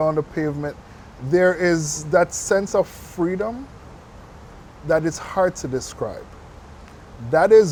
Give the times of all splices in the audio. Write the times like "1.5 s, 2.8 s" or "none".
none

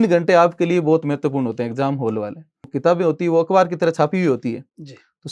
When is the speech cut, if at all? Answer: 2.6 s

